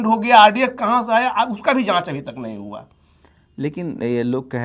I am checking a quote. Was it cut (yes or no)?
no